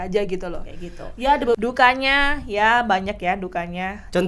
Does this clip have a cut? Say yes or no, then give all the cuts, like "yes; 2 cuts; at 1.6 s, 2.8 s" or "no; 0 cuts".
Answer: yes; 1 cut; at 1.6 s